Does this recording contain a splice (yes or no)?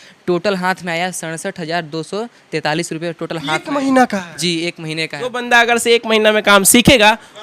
yes